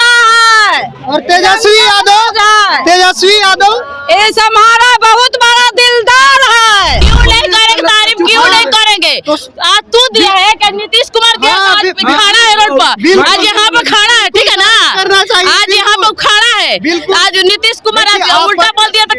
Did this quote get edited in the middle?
yes; 1 cut; at 7.1 s

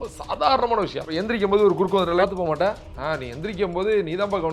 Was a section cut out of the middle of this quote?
yes; 3 cuts; at 1.1 s, 2.2 s, 2.9 s

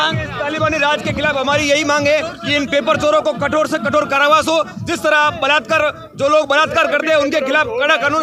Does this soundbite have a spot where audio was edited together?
no; 0 cuts

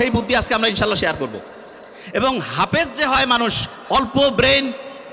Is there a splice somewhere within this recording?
no; 0 cuts

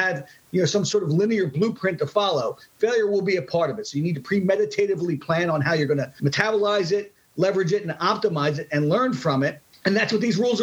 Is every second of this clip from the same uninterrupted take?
no; 2 cuts; at 6.1 s, 9.7 s

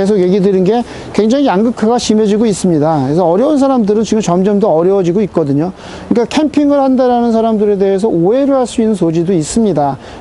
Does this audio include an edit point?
no; 0 cuts

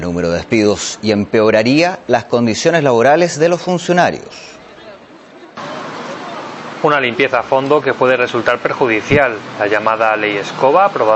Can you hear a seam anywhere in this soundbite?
no; 0 cuts

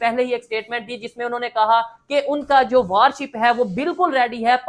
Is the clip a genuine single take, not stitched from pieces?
yes; 0 cuts

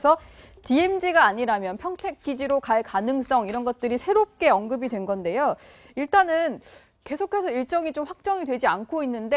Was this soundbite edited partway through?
no; 0 cuts

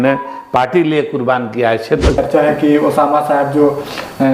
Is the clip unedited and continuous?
no; 1 cut; at 2.2 s

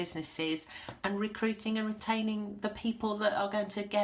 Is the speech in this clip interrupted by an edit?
yes; 1 cut; at 2.0 s

